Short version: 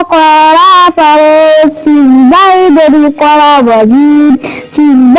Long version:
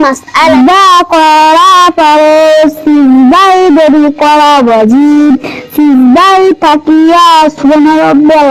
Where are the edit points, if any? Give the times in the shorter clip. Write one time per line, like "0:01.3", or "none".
none